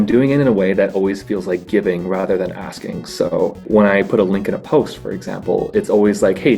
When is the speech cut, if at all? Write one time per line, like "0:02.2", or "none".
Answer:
0:03.6